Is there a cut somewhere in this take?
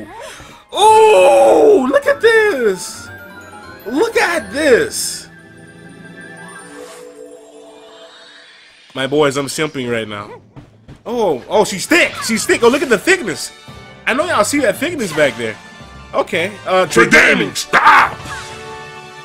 no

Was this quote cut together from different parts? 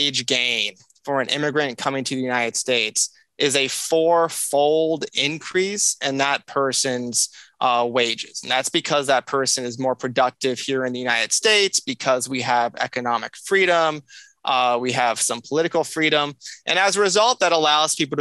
no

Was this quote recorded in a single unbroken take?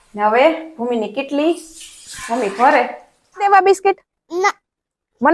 no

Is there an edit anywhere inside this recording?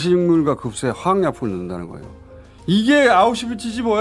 no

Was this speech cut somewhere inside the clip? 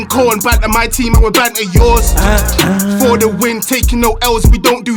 no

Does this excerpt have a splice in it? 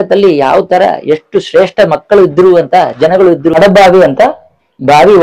yes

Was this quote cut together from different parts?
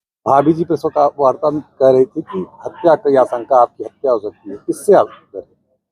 no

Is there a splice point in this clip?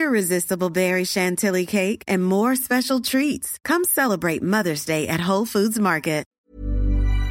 yes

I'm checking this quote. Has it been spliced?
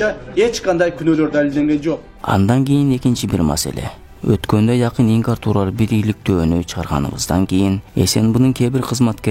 yes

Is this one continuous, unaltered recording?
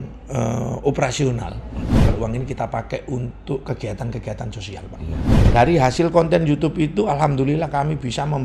no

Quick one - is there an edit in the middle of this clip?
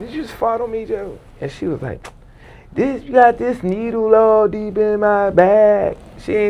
no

